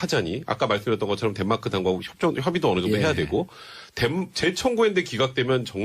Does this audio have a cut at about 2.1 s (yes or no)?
no